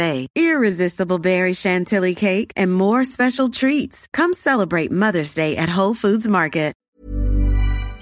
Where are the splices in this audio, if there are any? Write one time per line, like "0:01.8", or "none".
0:06.8